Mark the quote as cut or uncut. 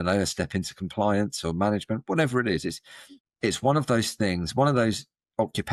cut